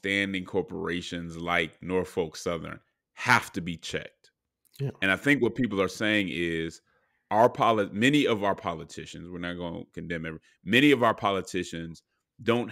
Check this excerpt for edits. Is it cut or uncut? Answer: uncut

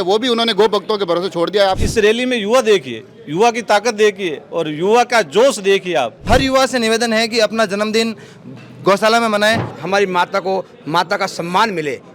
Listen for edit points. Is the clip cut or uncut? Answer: cut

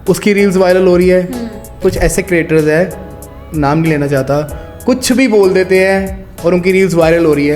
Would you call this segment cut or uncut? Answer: cut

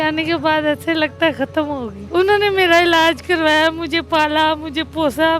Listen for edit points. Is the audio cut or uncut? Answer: cut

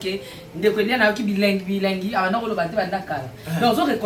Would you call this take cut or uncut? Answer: uncut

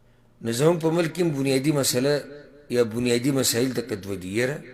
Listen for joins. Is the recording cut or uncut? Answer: uncut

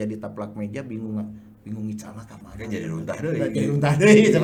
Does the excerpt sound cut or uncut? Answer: uncut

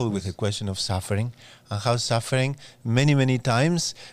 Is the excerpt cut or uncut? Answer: uncut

